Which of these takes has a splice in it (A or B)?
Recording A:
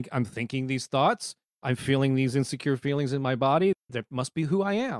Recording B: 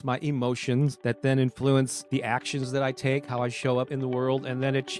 B